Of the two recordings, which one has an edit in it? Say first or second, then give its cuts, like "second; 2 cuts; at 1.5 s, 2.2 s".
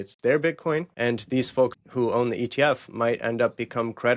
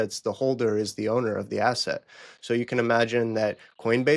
first; 2 cuts; at 0.9 s, 1.8 s